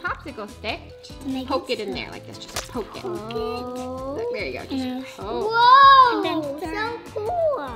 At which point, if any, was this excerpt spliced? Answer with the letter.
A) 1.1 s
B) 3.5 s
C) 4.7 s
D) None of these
A